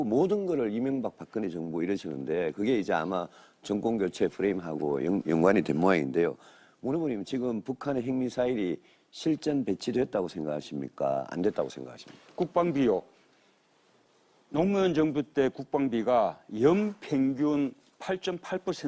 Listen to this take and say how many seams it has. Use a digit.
1